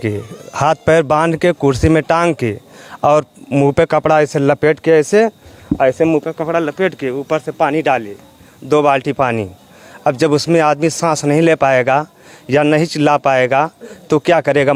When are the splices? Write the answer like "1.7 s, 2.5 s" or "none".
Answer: none

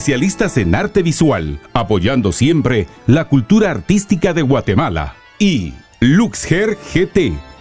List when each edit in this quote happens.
1.6 s, 5.6 s

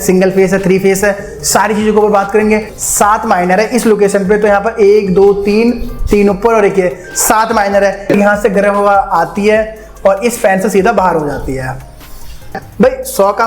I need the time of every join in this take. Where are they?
2.7 s, 8.1 s, 12.0 s

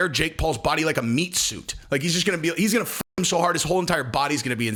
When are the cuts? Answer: none

